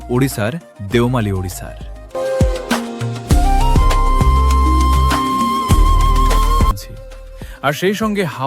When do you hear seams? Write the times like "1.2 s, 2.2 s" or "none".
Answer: 6.7 s